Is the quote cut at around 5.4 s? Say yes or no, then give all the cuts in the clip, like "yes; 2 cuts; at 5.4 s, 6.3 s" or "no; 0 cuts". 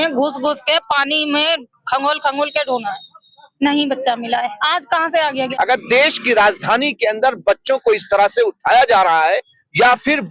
yes; 1 cut; at 5.4 s